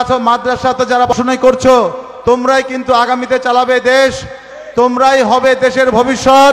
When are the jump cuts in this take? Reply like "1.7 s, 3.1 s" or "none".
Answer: 1.1 s